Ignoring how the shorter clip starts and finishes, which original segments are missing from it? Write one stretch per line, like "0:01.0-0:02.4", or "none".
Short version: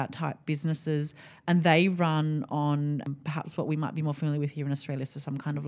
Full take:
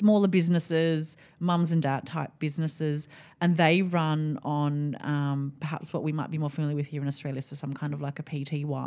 0:05.0-0:05.4